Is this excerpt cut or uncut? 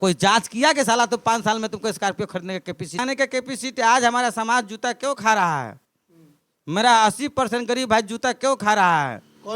cut